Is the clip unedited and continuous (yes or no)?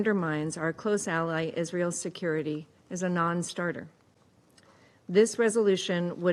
yes